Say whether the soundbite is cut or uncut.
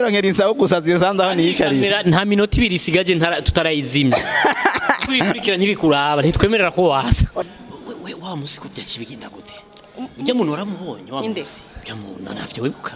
cut